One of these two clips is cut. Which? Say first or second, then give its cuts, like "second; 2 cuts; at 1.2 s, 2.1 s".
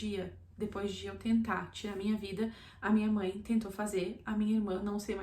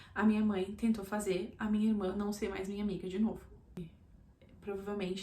second; 1 cut; at 3.8 s